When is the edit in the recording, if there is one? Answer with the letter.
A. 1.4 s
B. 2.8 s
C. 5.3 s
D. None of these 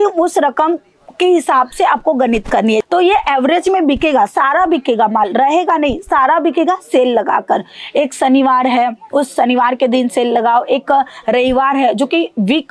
B